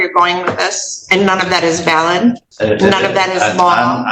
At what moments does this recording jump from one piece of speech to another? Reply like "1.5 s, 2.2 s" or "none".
2.5 s